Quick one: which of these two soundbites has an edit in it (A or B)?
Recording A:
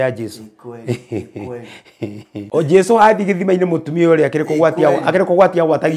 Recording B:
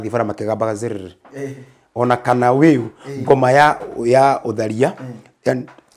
A